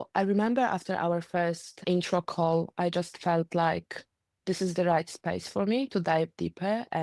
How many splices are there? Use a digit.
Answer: 1